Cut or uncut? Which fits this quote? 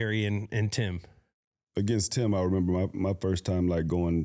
uncut